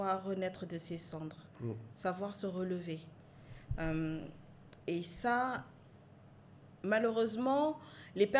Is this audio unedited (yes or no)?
yes